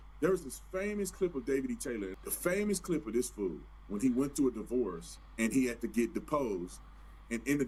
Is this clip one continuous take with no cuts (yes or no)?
yes